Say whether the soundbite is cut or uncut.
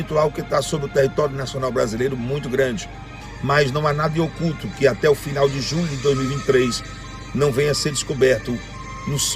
cut